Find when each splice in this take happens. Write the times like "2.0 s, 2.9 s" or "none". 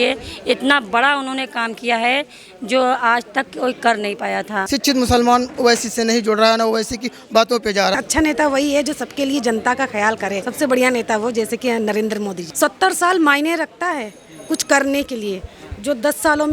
4.6 s, 8.0 s, 10.4 s, 12.4 s